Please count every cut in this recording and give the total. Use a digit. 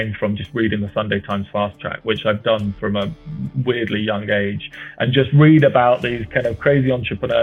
0